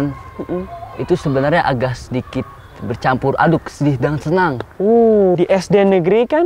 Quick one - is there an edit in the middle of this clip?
yes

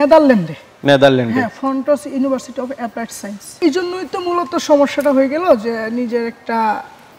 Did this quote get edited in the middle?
yes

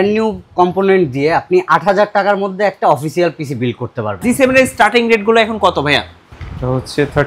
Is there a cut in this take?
yes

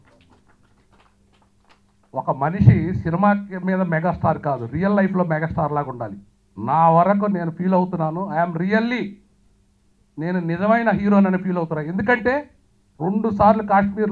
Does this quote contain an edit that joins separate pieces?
no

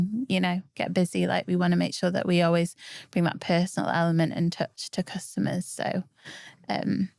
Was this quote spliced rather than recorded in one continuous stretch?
no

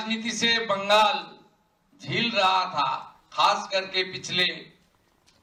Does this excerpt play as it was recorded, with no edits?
yes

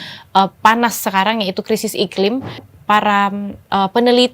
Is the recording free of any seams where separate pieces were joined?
no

